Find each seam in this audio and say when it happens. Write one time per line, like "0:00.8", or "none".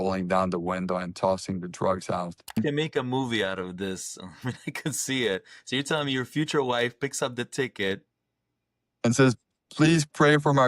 0:02.6

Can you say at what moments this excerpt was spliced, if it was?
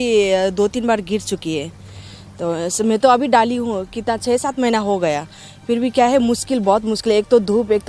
none

